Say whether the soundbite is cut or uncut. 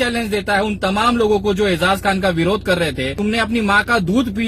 cut